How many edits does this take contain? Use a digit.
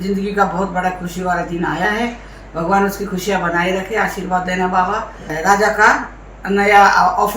1